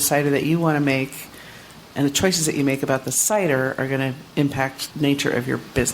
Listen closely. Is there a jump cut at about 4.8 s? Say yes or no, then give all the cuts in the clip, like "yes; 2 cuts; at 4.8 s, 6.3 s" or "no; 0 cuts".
yes; 1 cut; at 4.8 s